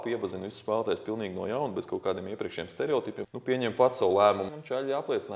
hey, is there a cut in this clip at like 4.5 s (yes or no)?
yes